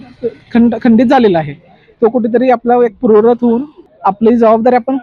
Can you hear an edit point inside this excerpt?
no; 0 cuts

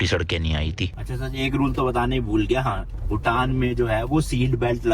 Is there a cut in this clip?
yes; 1 cut; at 1.1 s

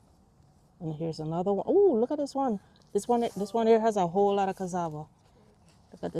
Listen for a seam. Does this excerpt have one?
no; 0 cuts

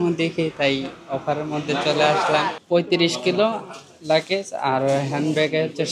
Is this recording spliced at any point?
yes; 1 cut; at 2.6 s

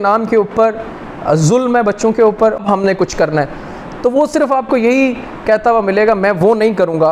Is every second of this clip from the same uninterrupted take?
no; 1 cut; at 2.6 s

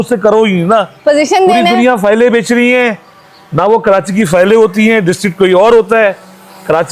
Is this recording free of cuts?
yes; 0 cuts

